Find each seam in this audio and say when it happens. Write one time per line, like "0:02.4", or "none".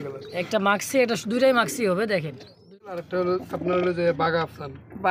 0:02.8